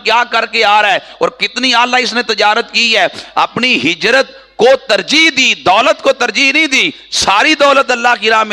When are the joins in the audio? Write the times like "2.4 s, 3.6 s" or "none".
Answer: none